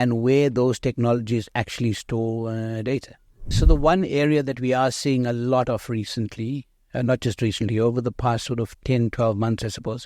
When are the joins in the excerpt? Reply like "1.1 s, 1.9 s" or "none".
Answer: 3.6 s